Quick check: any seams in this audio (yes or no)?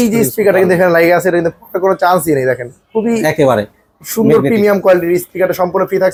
no